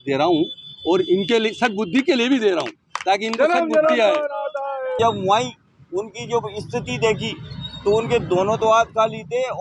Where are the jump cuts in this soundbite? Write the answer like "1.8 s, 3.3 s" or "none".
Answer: 5.0 s